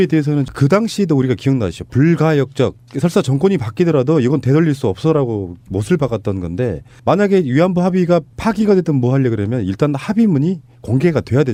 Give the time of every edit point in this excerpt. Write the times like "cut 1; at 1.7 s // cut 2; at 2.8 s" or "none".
none